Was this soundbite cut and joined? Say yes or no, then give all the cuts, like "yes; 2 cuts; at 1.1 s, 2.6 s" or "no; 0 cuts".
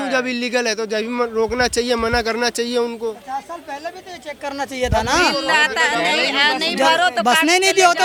no; 0 cuts